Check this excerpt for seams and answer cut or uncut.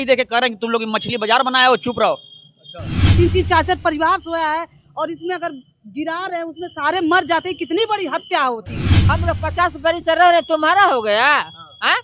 cut